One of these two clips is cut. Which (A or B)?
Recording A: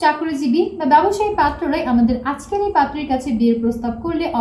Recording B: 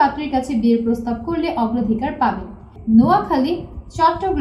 B